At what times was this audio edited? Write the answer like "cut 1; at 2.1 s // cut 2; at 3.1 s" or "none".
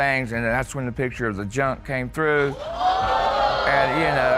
none